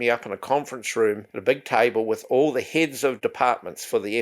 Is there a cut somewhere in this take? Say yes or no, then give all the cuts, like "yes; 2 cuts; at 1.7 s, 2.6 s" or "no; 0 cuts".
yes; 2 cuts; at 1.3 s, 3.2 s